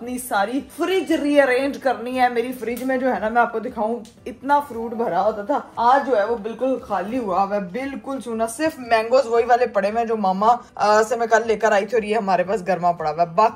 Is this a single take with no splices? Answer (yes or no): yes